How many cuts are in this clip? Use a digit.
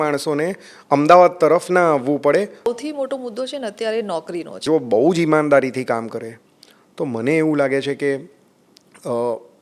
2